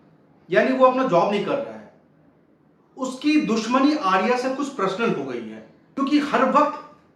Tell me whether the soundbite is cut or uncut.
cut